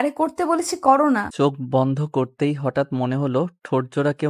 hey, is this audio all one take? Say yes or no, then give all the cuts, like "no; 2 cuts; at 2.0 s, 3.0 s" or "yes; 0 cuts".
no; 1 cut; at 1.3 s